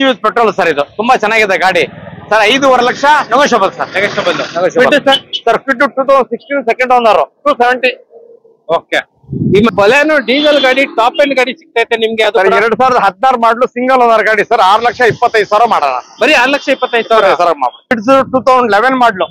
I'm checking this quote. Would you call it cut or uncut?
cut